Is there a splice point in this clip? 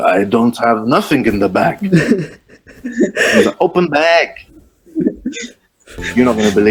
no; 0 cuts

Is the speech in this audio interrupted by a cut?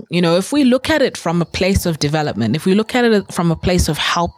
no; 0 cuts

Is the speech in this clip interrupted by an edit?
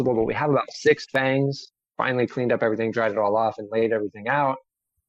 yes; 1 cut; at 1.8 s

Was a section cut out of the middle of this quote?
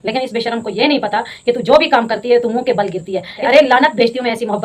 yes; 1 cut; at 3.4 s

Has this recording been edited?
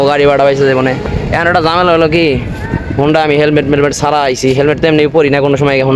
no; 0 cuts

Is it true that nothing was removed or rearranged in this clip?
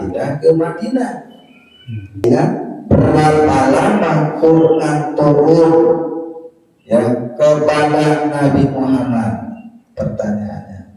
no; 1 cut; at 2.2 s

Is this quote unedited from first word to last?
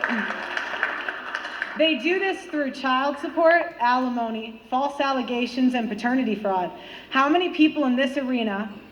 no; 1 cut; at 2.0 s

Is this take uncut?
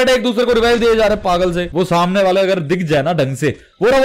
no; 1 cut; at 1.7 s

